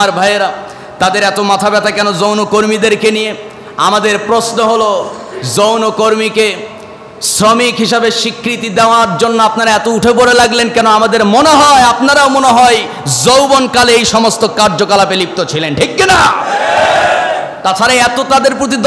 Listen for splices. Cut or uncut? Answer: uncut